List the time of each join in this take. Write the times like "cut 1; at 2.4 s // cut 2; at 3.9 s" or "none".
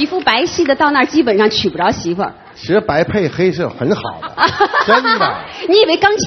cut 1; at 2.5 s